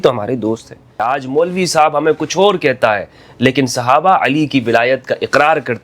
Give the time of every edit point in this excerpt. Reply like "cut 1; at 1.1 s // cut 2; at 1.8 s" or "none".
cut 1; at 0.9 s